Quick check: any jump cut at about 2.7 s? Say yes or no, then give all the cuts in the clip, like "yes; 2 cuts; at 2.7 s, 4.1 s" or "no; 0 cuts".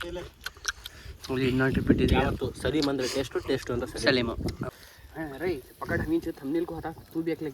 no; 1 cut; at 4.6 s